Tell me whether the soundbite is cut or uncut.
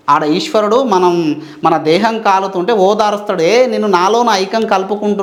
uncut